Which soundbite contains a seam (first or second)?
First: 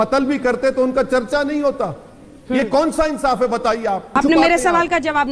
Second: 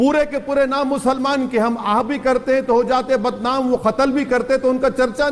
first